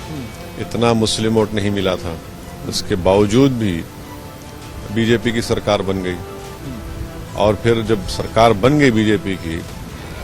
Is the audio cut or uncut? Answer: uncut